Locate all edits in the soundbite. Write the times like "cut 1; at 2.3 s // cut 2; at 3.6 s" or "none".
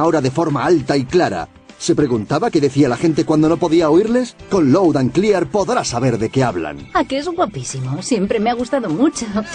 none